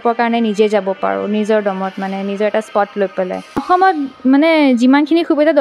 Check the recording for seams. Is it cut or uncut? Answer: cut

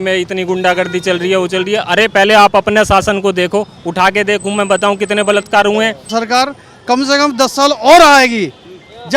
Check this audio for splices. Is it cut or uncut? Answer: cut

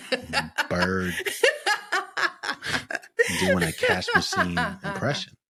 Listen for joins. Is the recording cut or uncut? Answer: uncut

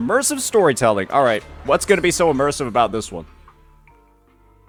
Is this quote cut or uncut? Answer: uncut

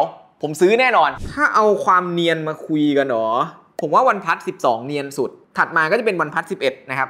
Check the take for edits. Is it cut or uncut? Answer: cut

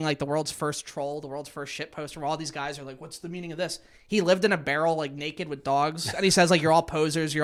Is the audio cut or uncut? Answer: uncut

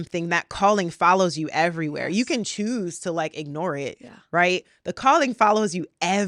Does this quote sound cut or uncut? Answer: uncut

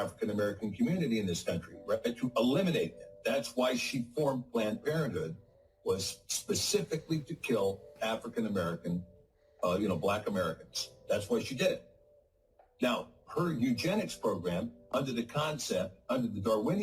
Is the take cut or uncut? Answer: cut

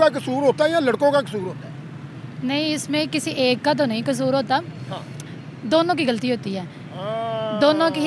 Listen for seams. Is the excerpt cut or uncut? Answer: uncut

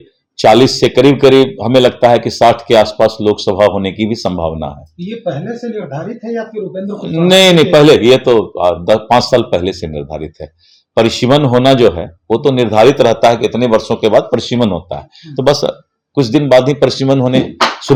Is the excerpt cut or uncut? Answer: uncut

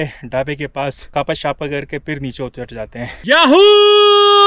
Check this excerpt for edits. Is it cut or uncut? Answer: cut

